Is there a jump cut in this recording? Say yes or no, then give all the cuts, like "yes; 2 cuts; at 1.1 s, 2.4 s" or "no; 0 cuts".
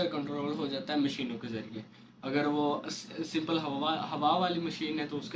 no; 0 cuts